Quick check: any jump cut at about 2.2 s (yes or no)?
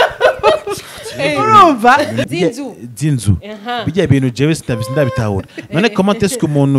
yes